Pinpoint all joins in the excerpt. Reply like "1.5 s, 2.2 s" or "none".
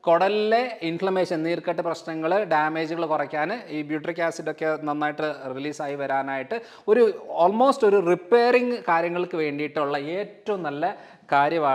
none